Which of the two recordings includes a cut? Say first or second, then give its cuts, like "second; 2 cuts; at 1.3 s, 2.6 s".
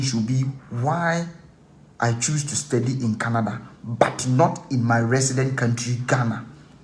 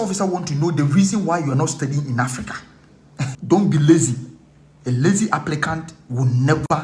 second; 1 cut; at 3.4 s